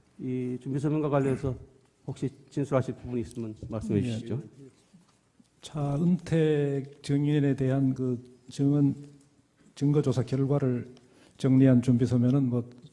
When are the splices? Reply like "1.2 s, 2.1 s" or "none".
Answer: 3.1 s